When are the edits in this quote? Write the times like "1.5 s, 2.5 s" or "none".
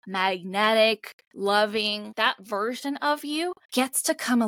1.3 s, 2.1 s, 3.6 s